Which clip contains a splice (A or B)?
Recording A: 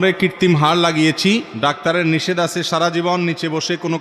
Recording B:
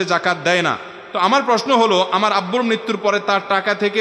A